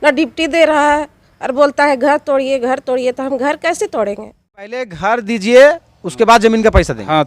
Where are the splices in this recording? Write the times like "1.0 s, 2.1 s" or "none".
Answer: 4.9 s